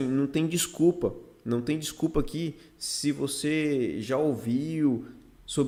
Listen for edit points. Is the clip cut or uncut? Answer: uncut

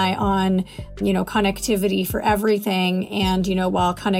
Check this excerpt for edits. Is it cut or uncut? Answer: cut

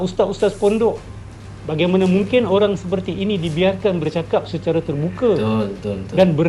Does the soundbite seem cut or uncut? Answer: uncut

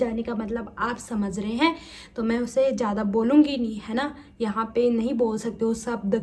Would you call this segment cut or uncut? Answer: uncut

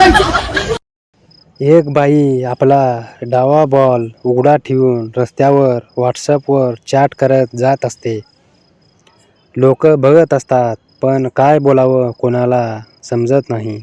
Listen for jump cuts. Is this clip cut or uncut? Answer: cut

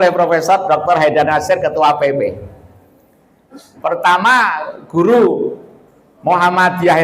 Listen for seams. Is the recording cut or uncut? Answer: cut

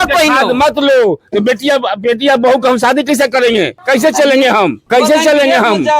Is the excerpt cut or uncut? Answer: cut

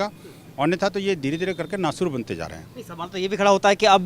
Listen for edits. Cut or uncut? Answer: uncut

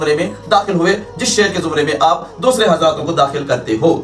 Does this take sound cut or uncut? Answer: uncut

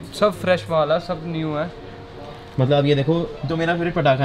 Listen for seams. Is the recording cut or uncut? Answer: uncut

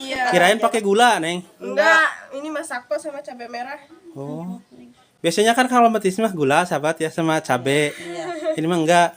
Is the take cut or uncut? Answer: uncut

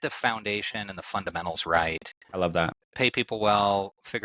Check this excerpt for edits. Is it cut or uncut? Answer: cut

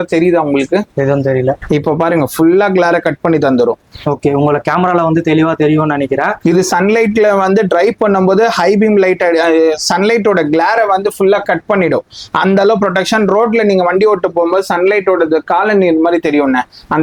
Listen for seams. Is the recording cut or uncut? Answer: uncut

